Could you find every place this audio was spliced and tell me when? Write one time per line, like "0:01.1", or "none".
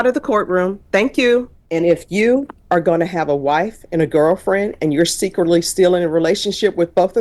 0:01.6